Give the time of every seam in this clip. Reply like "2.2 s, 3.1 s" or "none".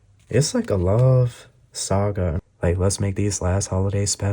2.4 s

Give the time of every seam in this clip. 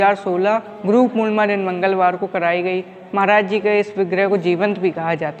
none

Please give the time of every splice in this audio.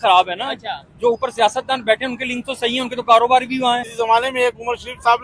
3.9 s

